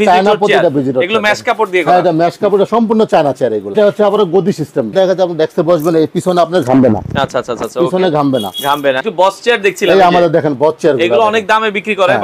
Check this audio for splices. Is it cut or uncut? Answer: cut